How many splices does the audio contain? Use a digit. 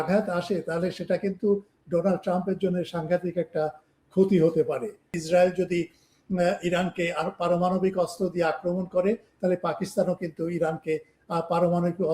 1